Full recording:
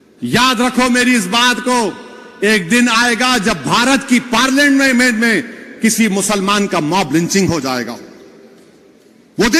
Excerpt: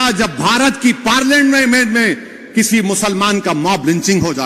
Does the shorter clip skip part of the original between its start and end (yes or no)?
no